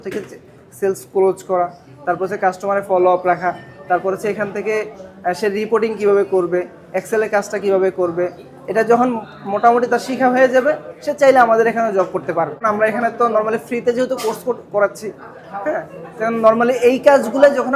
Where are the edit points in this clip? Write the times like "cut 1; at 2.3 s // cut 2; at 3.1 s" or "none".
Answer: cut 1; at 12.6 s